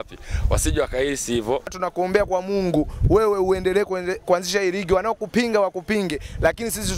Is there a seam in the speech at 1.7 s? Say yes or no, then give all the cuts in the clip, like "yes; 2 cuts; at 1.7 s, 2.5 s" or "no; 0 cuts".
yes; 1 cut; at 1.7 s